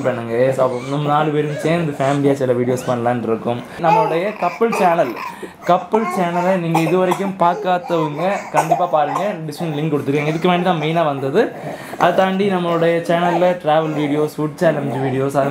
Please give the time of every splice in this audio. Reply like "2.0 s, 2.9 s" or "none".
3.8 s